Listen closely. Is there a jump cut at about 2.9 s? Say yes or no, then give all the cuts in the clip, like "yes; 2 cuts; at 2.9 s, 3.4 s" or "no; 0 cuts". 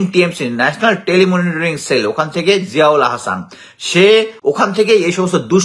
no; 1 cut; at 4.3 s